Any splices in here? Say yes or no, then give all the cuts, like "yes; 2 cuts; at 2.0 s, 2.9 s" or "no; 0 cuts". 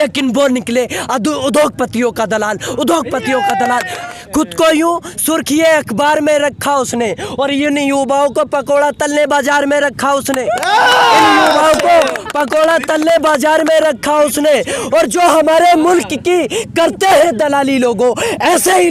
yes; 1 cut; at 4.0 s